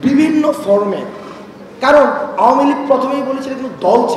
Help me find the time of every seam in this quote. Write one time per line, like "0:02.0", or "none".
none